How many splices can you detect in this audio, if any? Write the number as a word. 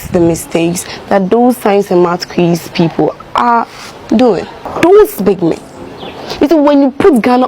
one